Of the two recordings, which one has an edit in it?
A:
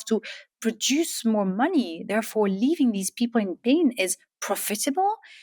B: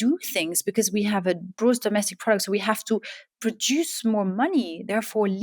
B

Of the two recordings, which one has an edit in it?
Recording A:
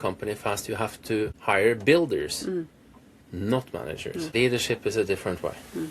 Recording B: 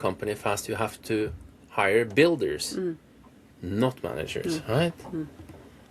A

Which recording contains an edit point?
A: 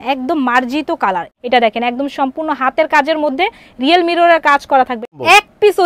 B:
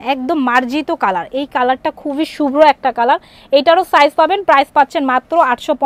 A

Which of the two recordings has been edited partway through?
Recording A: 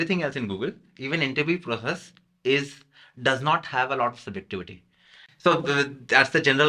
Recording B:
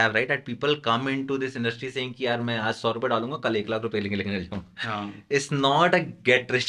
A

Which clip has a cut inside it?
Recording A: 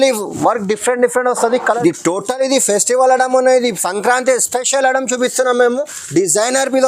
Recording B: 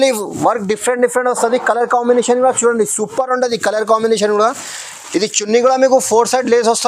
A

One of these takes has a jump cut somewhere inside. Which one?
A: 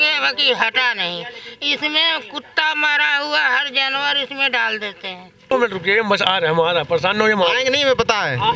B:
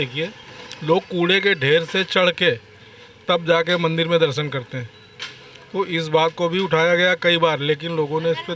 A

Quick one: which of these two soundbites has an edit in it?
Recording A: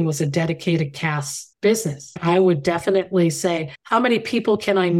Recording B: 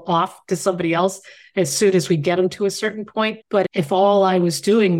A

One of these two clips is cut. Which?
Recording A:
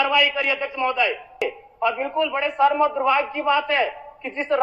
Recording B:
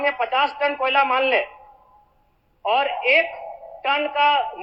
A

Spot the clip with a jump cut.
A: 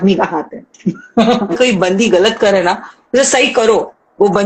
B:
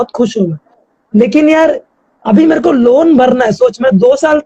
A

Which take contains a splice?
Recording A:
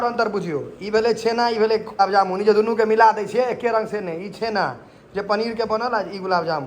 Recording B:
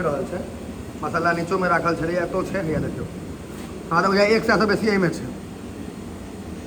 A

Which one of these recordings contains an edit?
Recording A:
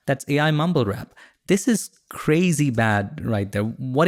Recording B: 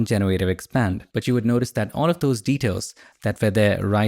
B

